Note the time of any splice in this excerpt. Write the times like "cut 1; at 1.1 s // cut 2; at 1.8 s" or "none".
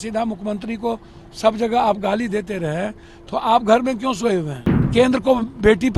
cut 1; at 4.9 s